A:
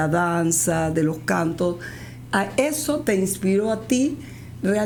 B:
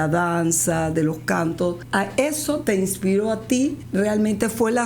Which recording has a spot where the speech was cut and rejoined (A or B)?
B